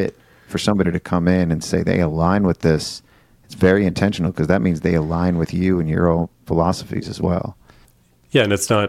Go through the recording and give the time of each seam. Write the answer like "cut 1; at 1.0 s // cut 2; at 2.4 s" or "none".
none